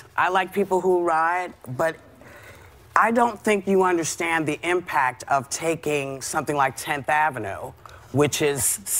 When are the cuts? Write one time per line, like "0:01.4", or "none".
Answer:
0:02.5